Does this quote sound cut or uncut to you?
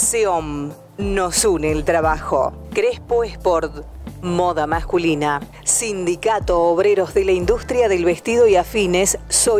uncut